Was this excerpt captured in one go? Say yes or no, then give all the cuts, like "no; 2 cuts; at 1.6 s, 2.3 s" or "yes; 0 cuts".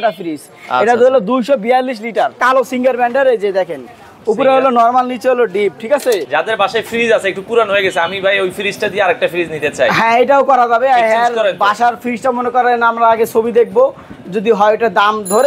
no; 2 cuts; at 2.4 s, 6.3 s